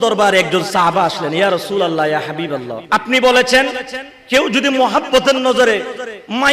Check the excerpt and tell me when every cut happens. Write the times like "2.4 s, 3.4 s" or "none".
2.8 s